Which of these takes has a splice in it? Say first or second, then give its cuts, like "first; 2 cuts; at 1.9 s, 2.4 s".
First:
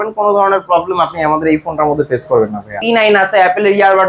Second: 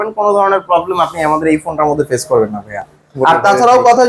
first; 1 cut; at 2.8 s